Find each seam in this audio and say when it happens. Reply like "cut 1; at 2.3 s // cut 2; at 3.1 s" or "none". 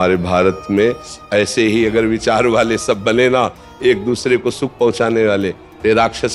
none

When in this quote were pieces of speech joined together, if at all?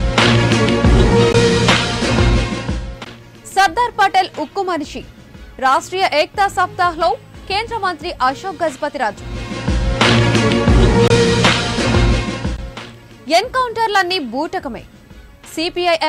cut 1; at 1.2 s

